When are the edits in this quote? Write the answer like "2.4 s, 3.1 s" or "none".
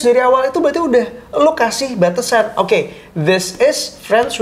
none